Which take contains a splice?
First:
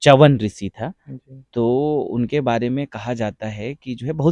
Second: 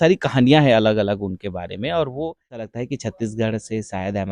second; 1 cut; at 2.7 s

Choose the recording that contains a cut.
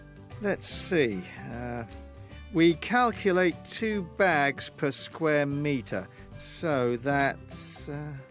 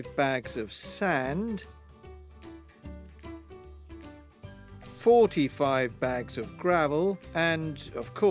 second; 2 cuts; at 2.0 s, 5.0 s

